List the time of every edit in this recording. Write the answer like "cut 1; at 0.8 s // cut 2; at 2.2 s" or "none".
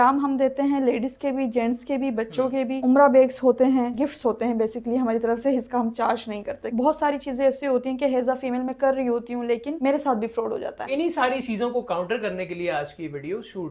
cut 1; at 2.8 s // cut 2; at 6.6 s // cut 3; at 10.9 s

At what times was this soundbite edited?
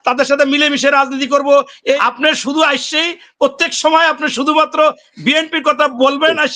cut 1; at 2.0 s

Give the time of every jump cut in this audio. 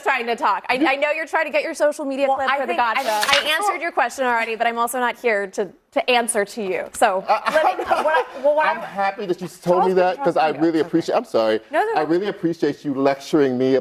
cut 1; at 3.3 s

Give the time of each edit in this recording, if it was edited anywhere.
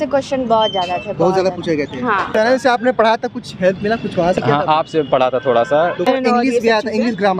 cut 1; at 2.3 s // cut 2; at 6.1 s

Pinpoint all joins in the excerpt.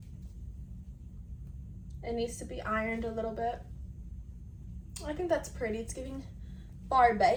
none

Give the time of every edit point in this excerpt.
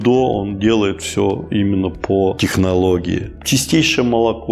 none

